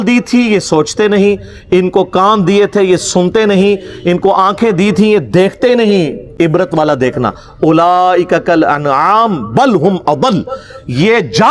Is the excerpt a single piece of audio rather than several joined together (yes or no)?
yes